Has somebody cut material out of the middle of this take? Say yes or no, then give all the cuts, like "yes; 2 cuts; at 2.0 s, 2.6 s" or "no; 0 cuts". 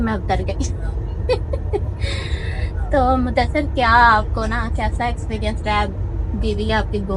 no; 0 cuts